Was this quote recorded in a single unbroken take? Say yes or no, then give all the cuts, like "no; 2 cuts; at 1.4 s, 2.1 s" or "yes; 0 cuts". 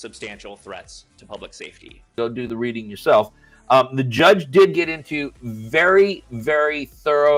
yes; 0 cuts